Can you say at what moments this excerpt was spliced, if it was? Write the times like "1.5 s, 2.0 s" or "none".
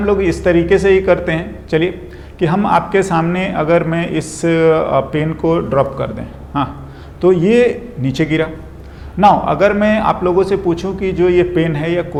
none